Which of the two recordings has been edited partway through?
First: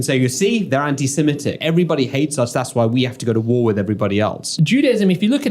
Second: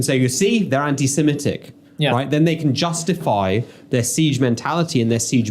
first; 2 cuts; at 1.5 s, 4.5 s

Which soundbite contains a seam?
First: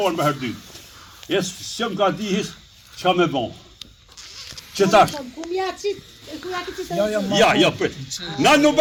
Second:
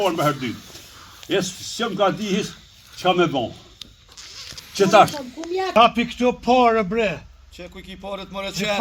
second; 1 cut; at 5.7 s

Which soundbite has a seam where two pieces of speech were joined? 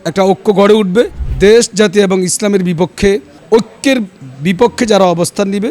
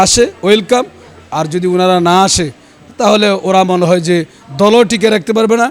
first; 2 cuts; at 1.2 s, 3.3 s

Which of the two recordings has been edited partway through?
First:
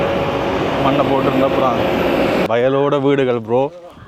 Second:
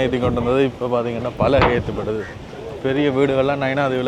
first; 1 cut; at 2.5 s

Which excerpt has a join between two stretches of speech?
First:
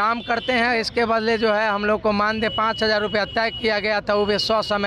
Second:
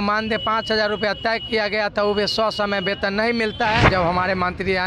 second; 1 cut; at 3.9 s

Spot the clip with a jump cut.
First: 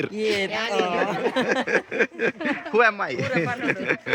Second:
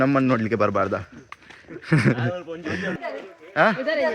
second; 1 cut; at 2.9 s

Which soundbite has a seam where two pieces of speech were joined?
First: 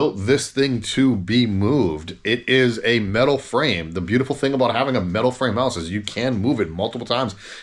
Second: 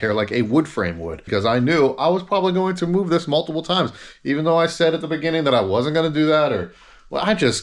second; 1 cut; at 1.2 s

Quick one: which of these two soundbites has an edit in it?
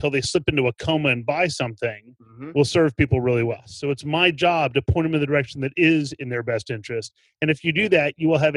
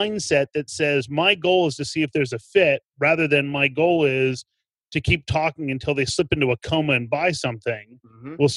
first; 1 cut; at 3.7 s

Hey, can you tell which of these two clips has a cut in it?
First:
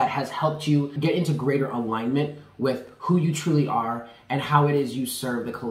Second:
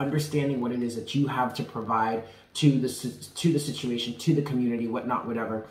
first; 1 cut; at 0.9 s

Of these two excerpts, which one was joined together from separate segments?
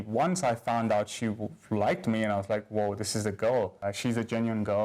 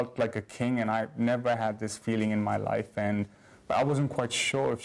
first; 1 cut; at 3.9 s

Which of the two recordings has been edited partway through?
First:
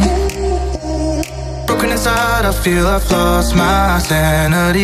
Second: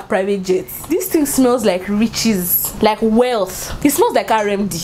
second; 3 cuts; at 0.9 s, 2.6 s, 3.6 s

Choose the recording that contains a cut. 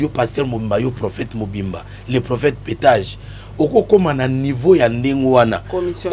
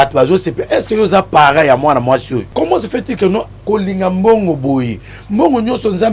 second; 1 cut; at 2.5 s

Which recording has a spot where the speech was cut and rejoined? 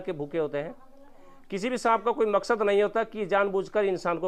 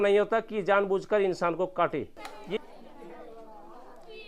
second; 1 cut; at 2.6 s

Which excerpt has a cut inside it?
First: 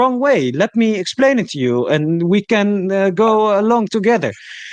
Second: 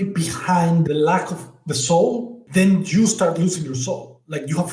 second; 2 cuts; at 0.9 s, 2.4 s

